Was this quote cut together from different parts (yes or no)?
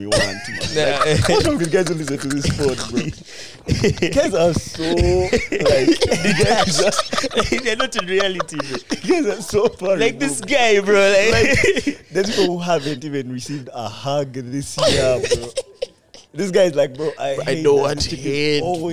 no